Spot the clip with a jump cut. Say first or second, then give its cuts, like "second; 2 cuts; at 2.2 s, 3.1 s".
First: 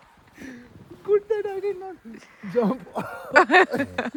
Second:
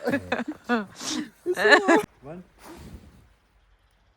second; 1 cut; at 2.0 s